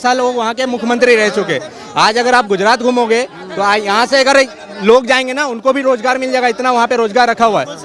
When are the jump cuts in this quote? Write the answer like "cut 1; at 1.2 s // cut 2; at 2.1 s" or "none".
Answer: none